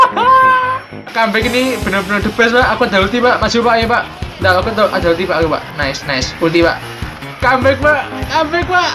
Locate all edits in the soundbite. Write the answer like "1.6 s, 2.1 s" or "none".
1.1 s